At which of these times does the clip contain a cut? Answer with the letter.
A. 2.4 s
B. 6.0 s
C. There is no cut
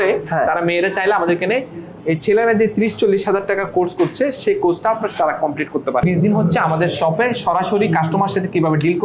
B